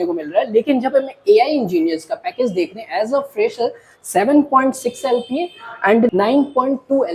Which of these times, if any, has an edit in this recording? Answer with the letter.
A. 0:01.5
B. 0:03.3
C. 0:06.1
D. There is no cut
C